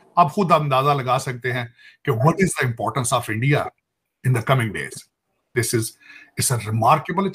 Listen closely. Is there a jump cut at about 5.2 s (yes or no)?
no